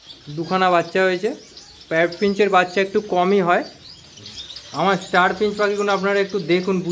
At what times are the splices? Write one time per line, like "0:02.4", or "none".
0:04.3